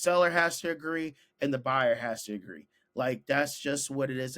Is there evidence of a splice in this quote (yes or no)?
no